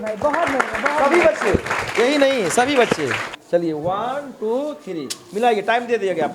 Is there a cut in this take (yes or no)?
yes